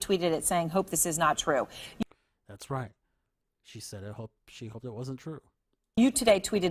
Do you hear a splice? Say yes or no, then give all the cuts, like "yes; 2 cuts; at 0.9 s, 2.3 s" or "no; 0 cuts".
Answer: no; 0 cuts